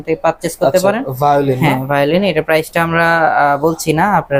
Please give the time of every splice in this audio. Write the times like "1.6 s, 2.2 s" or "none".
none